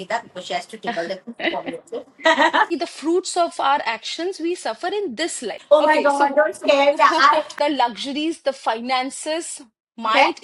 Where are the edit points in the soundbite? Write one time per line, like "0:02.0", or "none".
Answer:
0:02.7
0:05.5
0:07.5